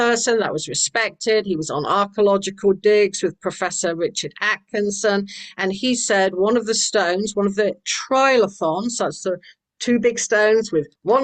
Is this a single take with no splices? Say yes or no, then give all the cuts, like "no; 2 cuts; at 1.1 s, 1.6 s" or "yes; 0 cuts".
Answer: yes; 0 cuts